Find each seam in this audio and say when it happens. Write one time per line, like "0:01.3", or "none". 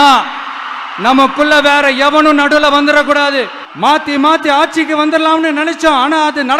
0:03.6